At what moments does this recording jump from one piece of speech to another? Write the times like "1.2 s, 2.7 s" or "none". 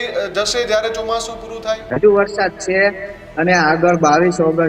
1.9 s